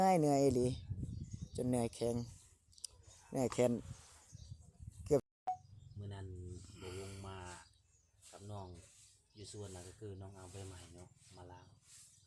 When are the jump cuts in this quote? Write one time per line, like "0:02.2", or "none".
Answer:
0:05.2